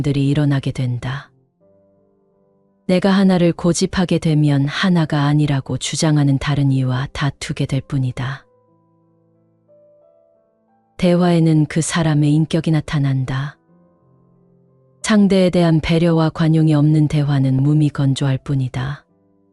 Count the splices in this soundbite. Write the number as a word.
two